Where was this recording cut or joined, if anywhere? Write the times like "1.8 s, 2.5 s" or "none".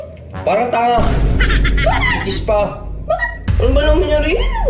3.4 s